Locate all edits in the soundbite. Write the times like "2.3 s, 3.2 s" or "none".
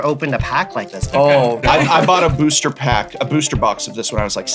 1.6 s